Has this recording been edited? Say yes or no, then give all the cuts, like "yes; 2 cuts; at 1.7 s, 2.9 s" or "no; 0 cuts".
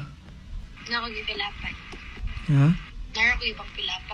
no; 0 cuts